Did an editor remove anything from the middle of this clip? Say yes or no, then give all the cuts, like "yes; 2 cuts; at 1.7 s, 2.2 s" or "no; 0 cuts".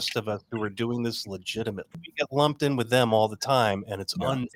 yes; 1 cut; at 2.0 s